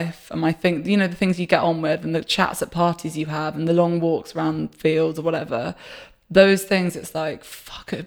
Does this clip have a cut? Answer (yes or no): no